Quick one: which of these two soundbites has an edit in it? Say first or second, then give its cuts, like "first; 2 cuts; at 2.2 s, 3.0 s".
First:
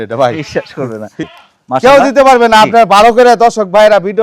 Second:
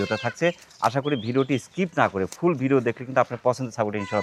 first; 1 cut; at 1.2 s